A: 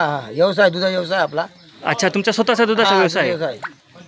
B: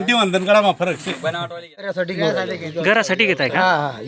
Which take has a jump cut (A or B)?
B